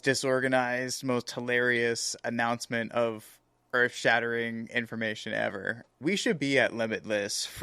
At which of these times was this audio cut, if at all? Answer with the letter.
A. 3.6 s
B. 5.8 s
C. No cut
B